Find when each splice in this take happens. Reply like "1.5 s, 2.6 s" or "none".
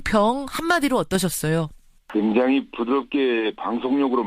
2.5 s